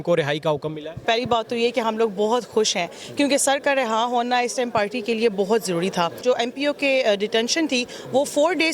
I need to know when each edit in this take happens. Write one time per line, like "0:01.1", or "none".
0:01.0
0:06.2